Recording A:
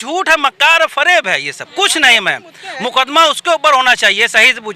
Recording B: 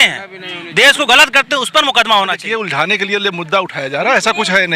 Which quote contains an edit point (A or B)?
B